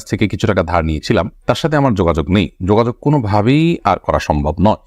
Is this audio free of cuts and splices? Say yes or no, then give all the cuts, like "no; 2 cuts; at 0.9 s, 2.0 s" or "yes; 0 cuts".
yes; 0 cuts